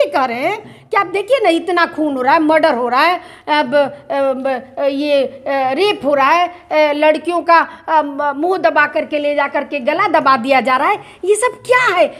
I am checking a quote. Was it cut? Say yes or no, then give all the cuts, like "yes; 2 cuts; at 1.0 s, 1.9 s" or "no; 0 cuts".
no; 0 cuts